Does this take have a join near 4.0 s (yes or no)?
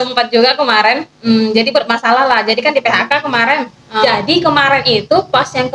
yes